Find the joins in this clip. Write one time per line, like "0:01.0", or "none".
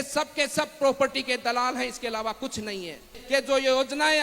0:03.1